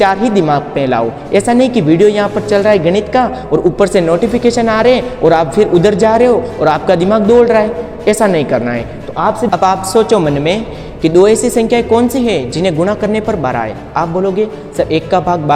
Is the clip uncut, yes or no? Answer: no